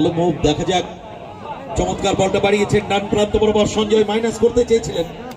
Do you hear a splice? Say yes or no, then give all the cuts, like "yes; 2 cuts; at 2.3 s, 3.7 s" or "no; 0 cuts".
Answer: no; 0 cuts